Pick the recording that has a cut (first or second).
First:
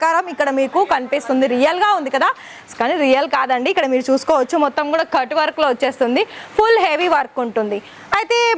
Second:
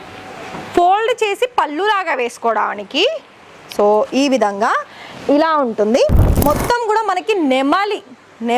second